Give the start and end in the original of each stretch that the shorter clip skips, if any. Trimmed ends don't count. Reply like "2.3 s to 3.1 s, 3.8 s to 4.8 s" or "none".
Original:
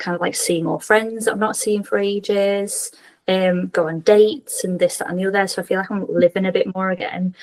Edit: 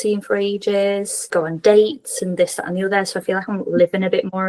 2.9 s to 3.7 s